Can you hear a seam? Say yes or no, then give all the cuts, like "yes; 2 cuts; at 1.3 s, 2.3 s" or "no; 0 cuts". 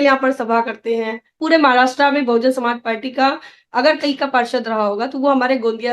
yes; 1 cut; at 1.2 s